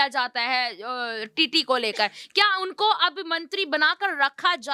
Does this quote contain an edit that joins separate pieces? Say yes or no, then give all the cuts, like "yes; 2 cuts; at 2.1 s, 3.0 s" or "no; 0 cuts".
no; 0 cuts